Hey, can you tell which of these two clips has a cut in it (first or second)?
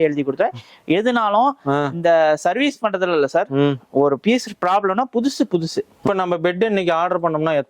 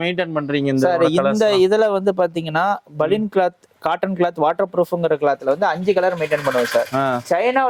first